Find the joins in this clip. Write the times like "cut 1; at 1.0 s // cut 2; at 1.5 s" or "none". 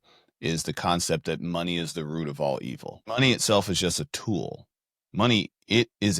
cut 1; at 3.0 s